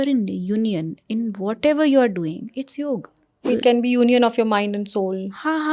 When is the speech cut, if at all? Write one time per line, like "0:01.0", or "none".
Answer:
0:03.5